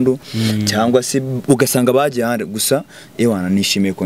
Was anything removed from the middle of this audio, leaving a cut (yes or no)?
no